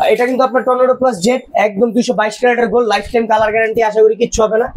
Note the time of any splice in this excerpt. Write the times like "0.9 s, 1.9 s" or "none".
none